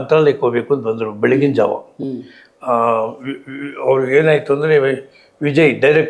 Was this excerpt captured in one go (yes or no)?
yes